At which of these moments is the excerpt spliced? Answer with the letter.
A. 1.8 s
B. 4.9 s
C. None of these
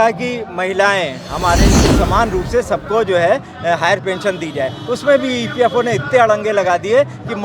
A